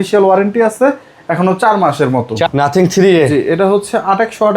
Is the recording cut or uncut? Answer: cut